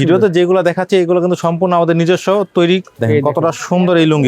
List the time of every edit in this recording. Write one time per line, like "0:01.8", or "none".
0:02.9